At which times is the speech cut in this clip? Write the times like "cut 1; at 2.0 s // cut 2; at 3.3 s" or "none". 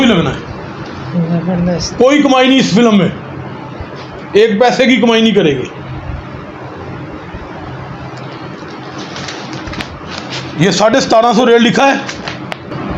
none